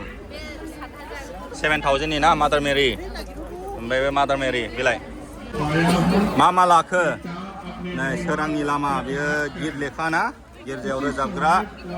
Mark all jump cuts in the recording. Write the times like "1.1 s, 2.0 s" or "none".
5.5 s